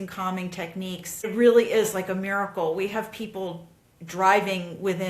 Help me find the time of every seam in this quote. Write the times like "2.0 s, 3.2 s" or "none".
1.2 s